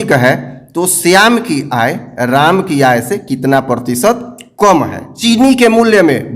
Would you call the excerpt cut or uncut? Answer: cut